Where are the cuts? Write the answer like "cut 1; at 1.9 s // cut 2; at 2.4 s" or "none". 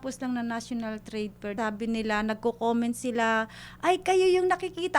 cut 1; at 1.5 s